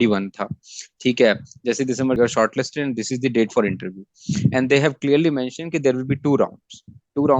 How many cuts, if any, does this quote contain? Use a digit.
1